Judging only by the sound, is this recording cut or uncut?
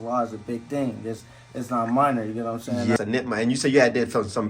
cut